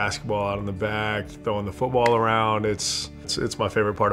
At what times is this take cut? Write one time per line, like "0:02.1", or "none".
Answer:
none

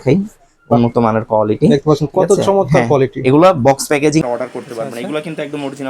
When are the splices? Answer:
0:04.2

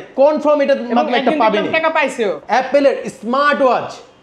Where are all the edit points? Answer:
0:02.4

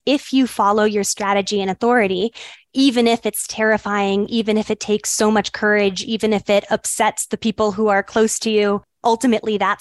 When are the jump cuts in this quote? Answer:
0:08.9

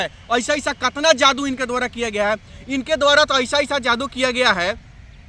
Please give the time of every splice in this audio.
none

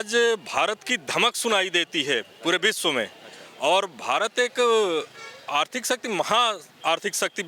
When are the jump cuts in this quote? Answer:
none

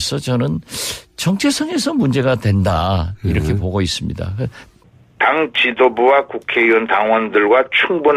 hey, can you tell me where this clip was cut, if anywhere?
0:05.0

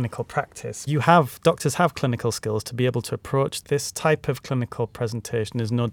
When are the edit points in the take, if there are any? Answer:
0:00.8
0:03.6

